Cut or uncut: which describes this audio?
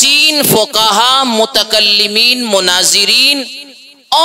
uncut